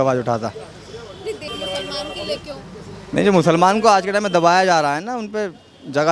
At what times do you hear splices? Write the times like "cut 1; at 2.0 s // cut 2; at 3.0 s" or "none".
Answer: cut 1; at 1.5 s